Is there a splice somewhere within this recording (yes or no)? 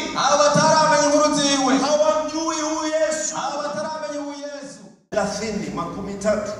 yes